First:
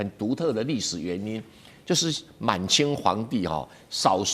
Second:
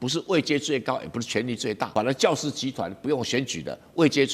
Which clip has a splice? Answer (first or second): second